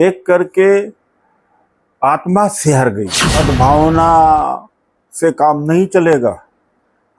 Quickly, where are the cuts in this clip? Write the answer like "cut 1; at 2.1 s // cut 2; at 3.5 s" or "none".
cut 1; at 3.2 s